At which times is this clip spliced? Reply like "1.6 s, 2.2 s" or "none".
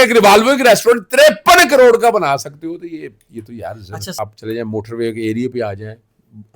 4.1 s